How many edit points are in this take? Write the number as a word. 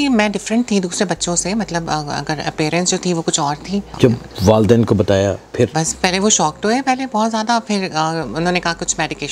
two